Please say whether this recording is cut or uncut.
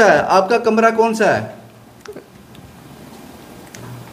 uncut